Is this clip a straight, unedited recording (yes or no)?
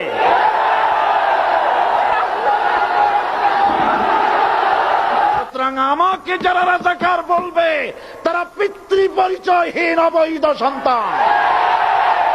no